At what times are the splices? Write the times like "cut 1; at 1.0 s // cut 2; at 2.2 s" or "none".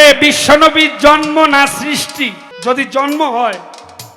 cut 1; at 2.5 s